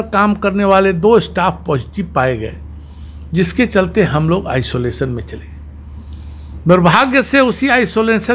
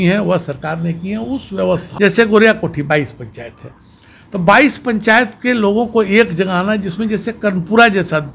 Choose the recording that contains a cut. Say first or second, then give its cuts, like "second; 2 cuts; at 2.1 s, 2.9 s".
second; 1 cut; at 1.9 s